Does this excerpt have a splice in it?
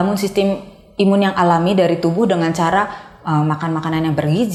no; 0 cuts

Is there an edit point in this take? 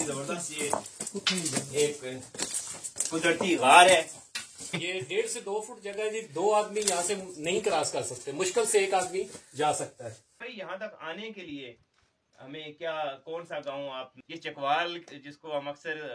yes; 3 cuts; at 4.8 s, 10.5 s, 14.2 s

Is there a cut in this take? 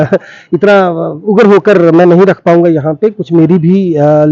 no; 0 cuts

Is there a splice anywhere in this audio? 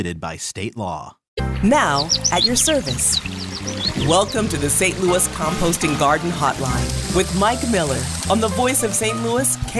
yes; 1 cut; at 1.4 s

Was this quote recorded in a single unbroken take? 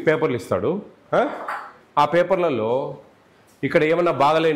yes; 0 cuts

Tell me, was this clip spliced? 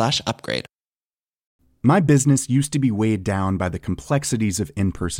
no; 0 cuts

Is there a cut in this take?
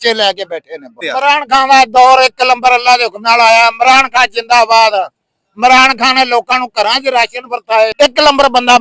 yes; 2 cuts; at 1.0 s, 7.9 s

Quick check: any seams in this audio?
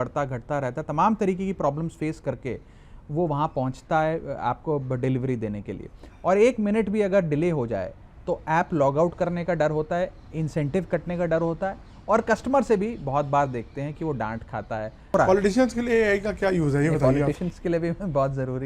yes; 1 cut; at 15.2 s

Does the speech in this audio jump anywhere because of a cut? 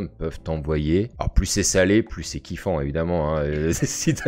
no; 0 cuts

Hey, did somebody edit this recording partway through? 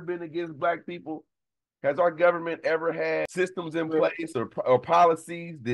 yes; 1 cut; at 3.3 s

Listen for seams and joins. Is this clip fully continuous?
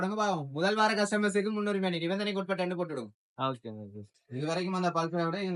no; 1 cut; at 4.0 s

